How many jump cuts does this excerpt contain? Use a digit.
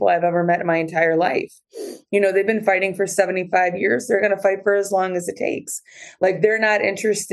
0